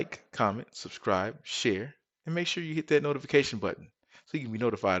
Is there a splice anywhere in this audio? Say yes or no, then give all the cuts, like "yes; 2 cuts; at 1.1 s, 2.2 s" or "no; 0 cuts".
no; 0 cuts